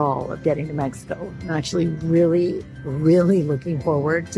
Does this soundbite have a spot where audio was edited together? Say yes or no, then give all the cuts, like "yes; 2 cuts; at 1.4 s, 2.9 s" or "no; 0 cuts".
no; 0 cuts